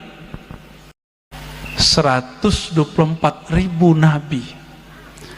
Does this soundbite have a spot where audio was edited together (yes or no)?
yes